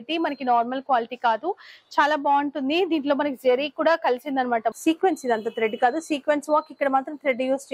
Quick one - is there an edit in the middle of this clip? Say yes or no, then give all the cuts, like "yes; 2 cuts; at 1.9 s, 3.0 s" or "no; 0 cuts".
yes; 1 cut; at 4.8 s